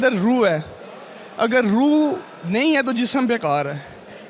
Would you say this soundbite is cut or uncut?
uncut